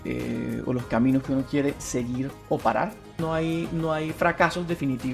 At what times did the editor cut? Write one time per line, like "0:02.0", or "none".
0:03.1